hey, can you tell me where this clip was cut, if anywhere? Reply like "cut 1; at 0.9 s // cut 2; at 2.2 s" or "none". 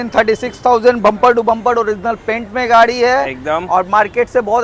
none